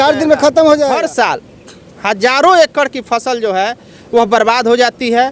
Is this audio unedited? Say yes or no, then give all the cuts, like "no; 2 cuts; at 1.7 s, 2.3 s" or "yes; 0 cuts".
no; 1 cut; at 0.9 s